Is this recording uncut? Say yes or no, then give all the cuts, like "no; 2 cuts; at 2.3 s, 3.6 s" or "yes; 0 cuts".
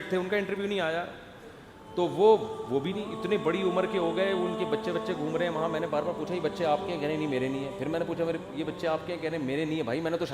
yes; 0 cuts